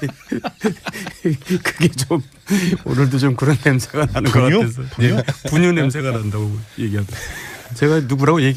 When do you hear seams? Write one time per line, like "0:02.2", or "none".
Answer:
none